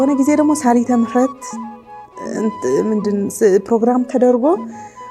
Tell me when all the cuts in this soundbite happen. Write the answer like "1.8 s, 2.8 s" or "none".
none

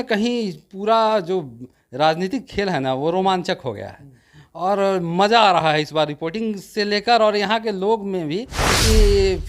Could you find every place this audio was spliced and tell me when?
8.6 s

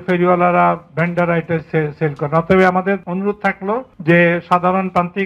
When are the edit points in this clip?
3.0 s, 3.9 s

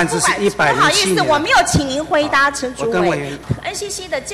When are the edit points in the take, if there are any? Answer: 3.4 s

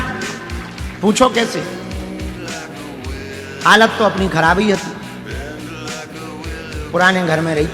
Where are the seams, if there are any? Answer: 1.7 s, 3.5 s, 5.1 s, 6.9 s

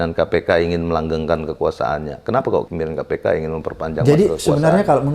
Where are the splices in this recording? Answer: 2.7 s

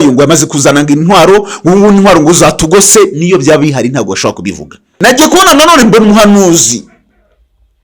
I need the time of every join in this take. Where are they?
4.9 s

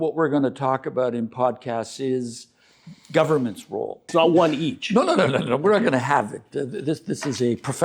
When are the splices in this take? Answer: 4.0 s

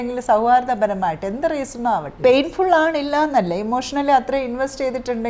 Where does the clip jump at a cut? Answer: 2.1 s

